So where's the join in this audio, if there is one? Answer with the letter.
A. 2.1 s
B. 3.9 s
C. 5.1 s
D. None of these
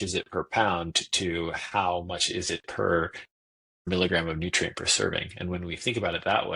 B